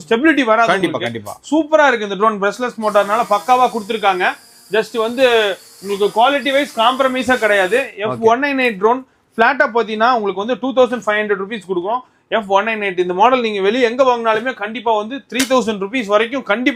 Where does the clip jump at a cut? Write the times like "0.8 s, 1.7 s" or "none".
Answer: none